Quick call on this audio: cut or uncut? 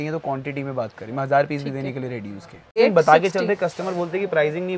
cut